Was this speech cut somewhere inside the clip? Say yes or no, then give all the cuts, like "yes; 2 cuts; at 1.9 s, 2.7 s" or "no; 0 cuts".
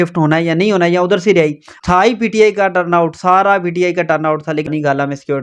yes; 2 cuts; at 1.7 s, 4.7 s